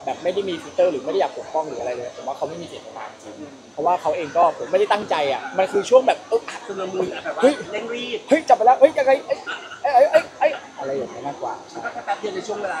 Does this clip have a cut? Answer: no; 0 cuts

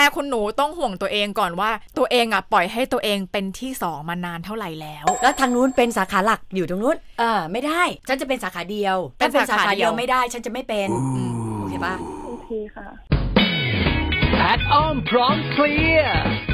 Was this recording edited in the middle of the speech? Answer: yes; 2 cuts; at 5.2 s, 8.0 s

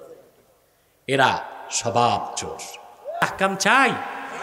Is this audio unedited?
no; 1 cut; at 3.2 s

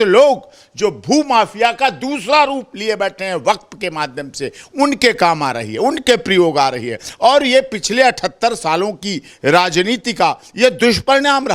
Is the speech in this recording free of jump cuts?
yes; 0 cuts

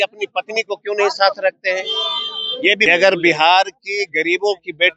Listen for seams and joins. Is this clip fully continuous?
no; 1 cut; at 2.9 s

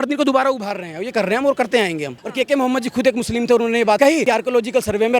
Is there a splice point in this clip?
yes; 2 cuts; at 2.2 s, 4.0 s

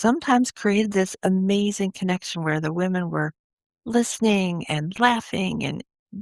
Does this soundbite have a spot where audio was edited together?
no; 0 cuts

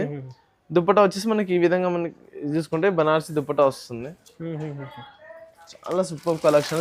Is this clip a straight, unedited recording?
yes; 0 cuts

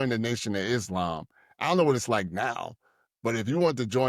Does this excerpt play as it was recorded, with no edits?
yes; 0 cuts

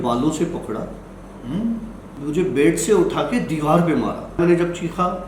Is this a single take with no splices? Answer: no; 2 cuts; at 2.0 s, 4.4 s

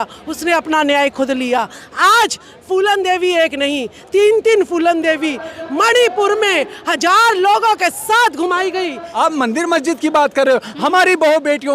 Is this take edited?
yes; 1 cut; at 9.1 s

